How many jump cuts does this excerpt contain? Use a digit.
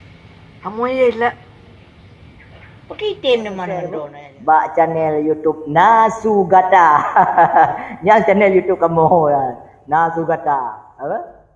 1